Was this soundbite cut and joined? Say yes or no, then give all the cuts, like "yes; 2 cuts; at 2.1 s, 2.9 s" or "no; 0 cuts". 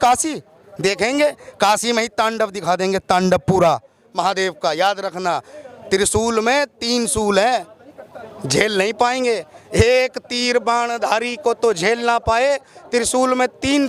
no; 0 cuts